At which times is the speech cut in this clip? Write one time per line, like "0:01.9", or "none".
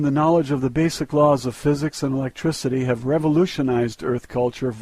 0:02.8